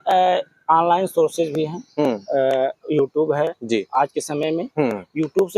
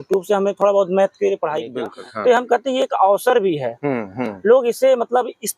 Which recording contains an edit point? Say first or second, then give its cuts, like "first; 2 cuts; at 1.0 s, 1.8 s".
second; 1 cut; at 1.8 s